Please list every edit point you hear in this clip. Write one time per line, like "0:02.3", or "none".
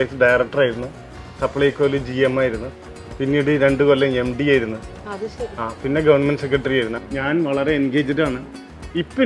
0:07.0